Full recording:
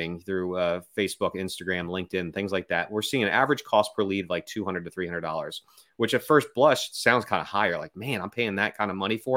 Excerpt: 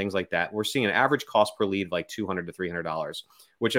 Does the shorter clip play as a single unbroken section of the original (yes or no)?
yes